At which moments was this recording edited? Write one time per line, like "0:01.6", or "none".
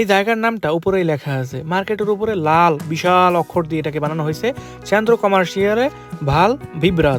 none